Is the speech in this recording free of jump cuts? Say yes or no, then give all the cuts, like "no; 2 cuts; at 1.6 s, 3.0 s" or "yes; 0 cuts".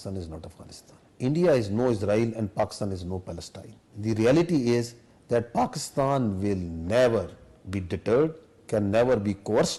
yes; 0 cuts